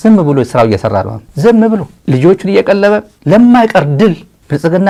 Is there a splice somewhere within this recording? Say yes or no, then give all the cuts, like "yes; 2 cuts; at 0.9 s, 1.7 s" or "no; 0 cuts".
no; 0 cuts